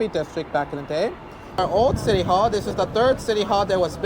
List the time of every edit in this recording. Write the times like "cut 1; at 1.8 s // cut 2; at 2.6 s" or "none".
cut 1; at 1.6 s

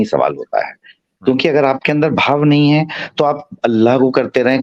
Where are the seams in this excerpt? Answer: none

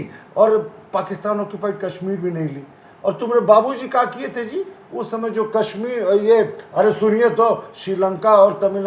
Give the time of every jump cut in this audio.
none

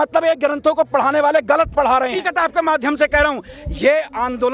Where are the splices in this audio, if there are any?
cut 1; at 2.1 s

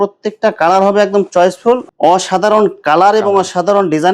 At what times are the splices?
cut 1; at 1.8 s

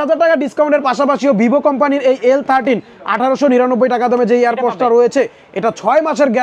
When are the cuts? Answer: none

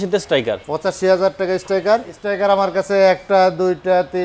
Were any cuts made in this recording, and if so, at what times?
cut 1; at 2.2 s

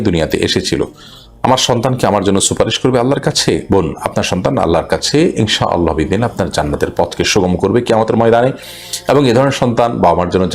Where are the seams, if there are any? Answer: none

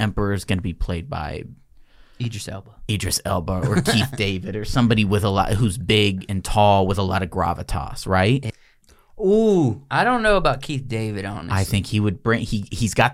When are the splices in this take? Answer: cut 1; at 8.5 s

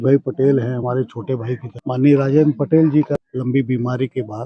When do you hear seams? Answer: cut 1; at 1.7 s // cut 2; at 3.2 s

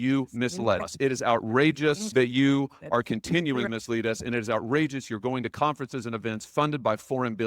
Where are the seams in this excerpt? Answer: cut 1; at 0.8 s // cut 2; at 2.1 s // cut 3; at 3.7 s

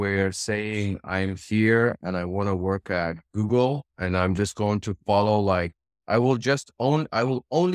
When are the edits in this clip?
none

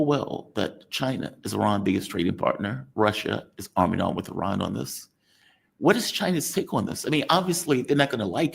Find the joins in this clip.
none

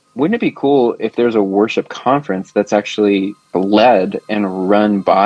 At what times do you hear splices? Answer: cut 1; at 3.5 s

